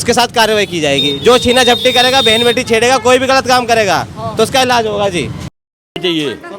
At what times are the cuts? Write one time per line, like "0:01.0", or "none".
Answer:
0:05.6

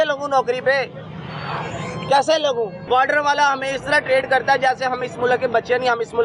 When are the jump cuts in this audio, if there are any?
0:02.8

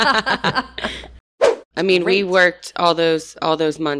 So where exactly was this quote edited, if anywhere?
0:01.2

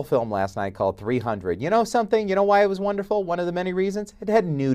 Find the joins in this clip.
0:03.2

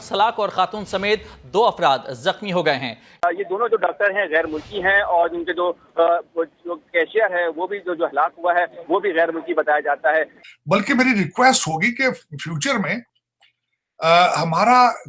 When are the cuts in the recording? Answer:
0:03.2
0:10.3

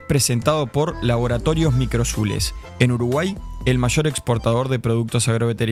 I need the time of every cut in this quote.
none

